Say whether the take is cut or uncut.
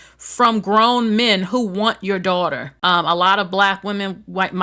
cut